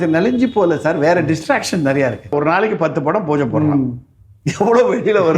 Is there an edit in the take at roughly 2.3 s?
yes; 1 cut; at 2.3 s

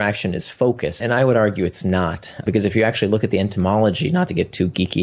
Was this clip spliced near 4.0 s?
no; 2 cuts; at 1.0 s, 2.4 s

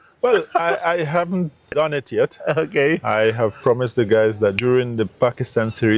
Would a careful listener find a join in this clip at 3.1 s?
no; 2 cuts; at 1.7 s, 4.6 s

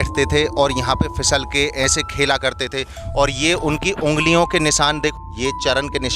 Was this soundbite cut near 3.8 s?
no; 1 cut; at 5.1 s

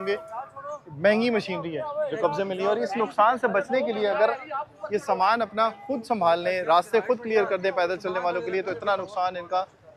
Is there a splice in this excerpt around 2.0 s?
no; 0 cuts

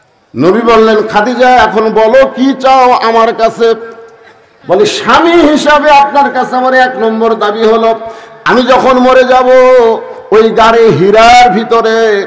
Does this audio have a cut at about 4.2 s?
no; 0 cuts

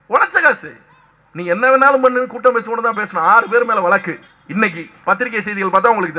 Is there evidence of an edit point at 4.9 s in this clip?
yes; 1 cut; at 4.9 s

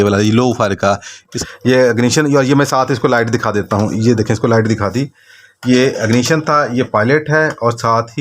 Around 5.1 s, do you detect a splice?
no; 1 cut; at 1.4 s

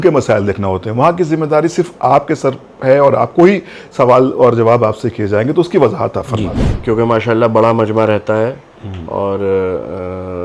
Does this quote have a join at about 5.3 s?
no; 1 cut; at 6.7 s

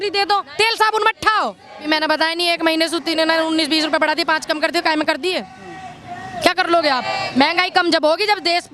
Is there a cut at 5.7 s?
no; 1 cut; at 1.9 s

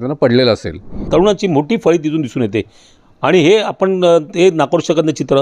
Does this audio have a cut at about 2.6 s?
no; 1 cut; at 1.1 s

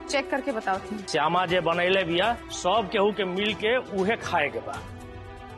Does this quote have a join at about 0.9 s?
yes; 1 cut; at 0.9 s

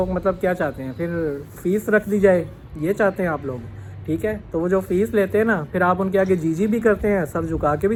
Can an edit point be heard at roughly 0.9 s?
no; 0 cuts

